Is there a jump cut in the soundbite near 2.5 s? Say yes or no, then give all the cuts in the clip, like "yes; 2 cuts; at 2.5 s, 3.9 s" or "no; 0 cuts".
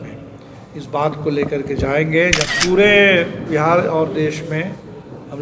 yes; 1 cut; at 2.5 s